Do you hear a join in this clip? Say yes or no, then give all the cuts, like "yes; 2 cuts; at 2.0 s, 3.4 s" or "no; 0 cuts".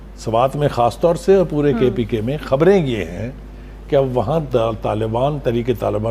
no; 0 cuts